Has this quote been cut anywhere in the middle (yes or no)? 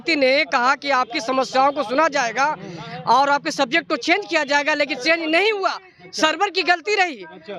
no